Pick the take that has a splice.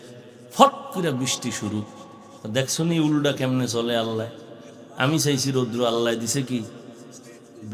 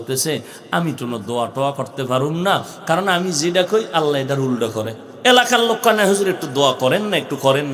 second; 1 cut; at 5.0 s

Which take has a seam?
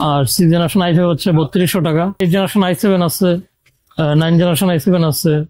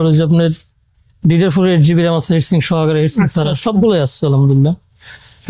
first; 1 cut; at 2.2 s

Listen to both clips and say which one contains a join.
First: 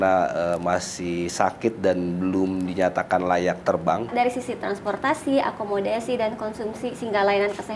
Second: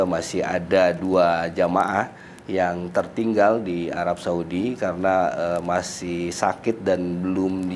first; 1 cut; at 4.1 s

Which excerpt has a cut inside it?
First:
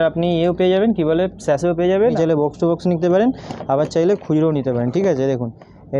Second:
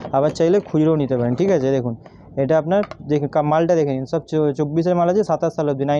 first; 1 cut; at 2.1 s

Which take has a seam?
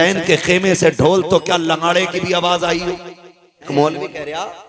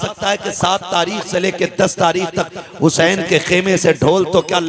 first; 1 cut; at 3.7 s

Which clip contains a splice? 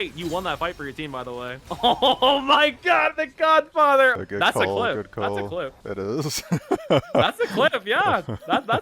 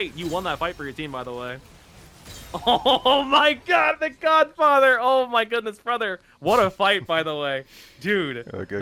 first; 3 cuts; at 1.6 s, 4.1 s, 5.8 s

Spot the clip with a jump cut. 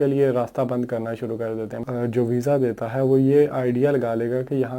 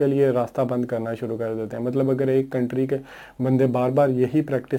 first; 1 cut; at 1.8 s

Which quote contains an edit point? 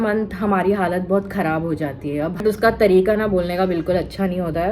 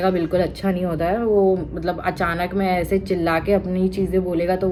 first; 1 cut; at 2.4 s

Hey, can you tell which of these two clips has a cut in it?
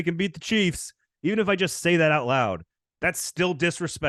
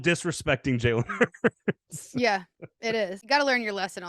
second; 1 cut; at 3.2 s

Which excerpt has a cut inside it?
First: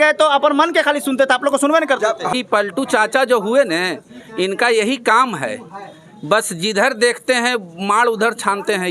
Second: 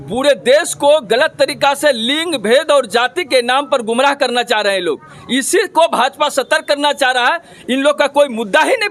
first; 1 cut; at 2.3 s

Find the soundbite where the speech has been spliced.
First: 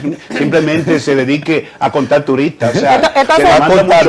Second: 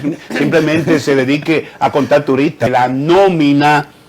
second; 1 cut; at 2.7 s

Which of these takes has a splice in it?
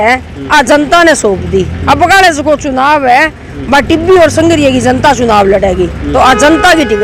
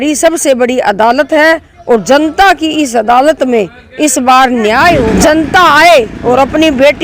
second; 1 cut; at 5.1 s

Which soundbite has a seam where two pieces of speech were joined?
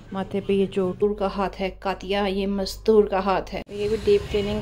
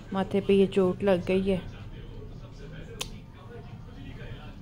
first; 2 cuts; at 1.0 s, 3.6 s

